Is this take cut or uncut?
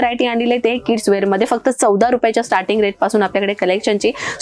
uncut